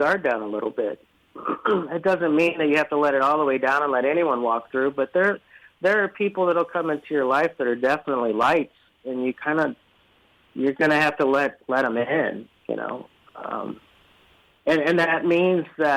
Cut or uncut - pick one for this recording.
uncut